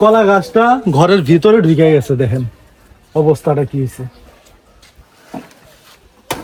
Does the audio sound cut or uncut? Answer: uncut